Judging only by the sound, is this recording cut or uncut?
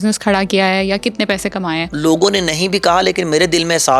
cut